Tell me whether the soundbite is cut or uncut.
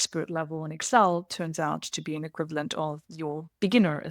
cut